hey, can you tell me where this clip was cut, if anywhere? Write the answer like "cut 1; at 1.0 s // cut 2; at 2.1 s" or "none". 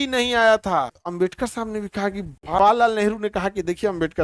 cut 1; at 1.0 s // cut 2; at 2.6 s